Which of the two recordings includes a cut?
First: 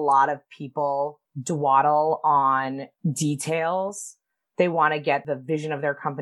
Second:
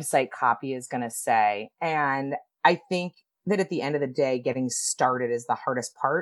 first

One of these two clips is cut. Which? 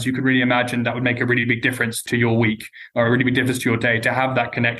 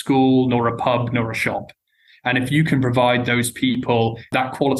first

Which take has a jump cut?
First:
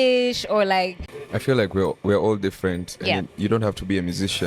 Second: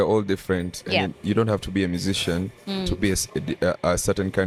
first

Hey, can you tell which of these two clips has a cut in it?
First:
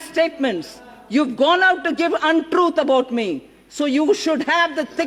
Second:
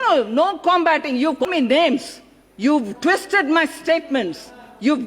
second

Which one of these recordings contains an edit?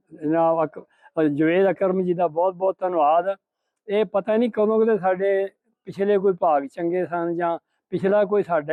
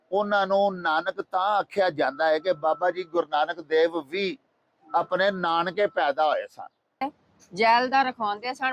second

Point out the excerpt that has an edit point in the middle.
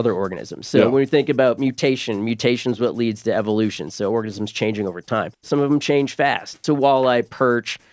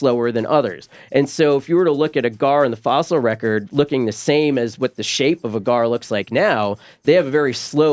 first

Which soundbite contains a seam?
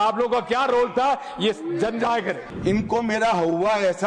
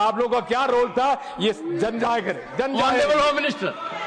first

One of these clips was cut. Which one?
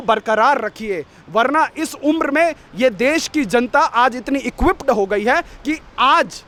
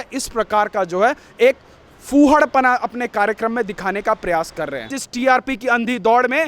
second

